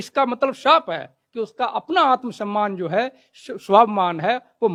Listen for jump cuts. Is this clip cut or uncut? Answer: uncut